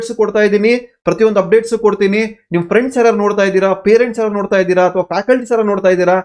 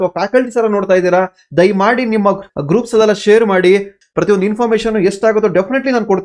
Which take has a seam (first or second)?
second